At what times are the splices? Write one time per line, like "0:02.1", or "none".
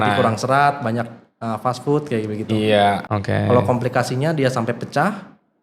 0:03.0